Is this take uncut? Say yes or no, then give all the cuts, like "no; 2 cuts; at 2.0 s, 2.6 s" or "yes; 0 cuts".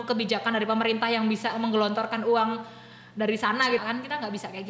no; 1 cut; at 3.8 s